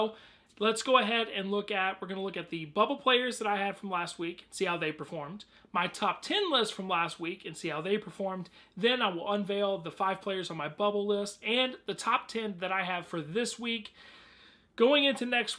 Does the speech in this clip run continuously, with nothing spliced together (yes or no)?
no